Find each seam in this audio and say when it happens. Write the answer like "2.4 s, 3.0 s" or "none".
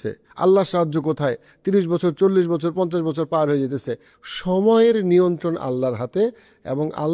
4.1 s